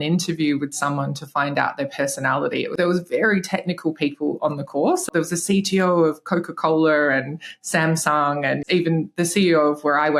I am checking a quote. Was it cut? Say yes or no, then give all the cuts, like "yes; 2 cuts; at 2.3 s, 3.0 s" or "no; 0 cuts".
yes; 3 cuts; at 2.8 s, 5.1 s, 8.6 s